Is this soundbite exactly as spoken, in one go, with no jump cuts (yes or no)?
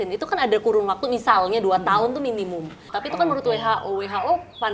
no